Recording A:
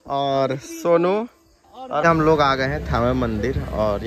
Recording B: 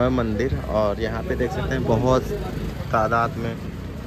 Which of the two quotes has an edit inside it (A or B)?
A